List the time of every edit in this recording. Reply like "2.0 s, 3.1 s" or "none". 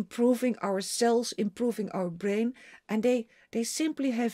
none